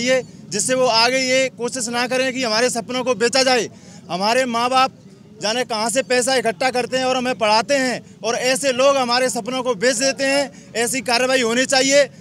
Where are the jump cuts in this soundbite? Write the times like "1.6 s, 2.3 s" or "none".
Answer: none